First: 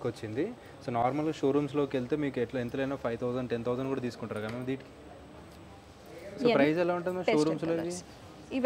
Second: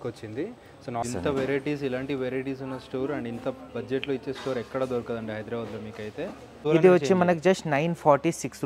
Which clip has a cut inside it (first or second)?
second